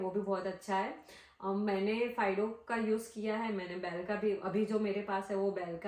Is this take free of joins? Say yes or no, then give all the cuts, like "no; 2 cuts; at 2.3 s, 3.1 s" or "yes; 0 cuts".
yes; 0 cuts